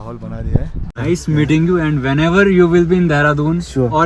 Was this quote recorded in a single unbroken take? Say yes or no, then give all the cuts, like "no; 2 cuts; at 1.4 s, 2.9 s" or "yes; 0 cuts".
no; 1 cut; at 1.0 s